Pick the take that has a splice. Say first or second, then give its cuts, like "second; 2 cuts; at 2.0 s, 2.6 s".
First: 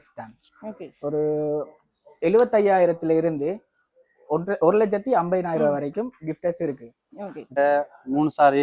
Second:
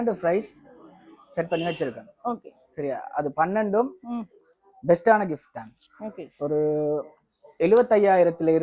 first; 1 cut; at 7.6 s